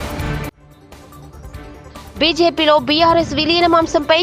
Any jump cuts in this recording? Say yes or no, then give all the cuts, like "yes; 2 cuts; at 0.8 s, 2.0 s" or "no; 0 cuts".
yes; 1 cut; at 2.0 s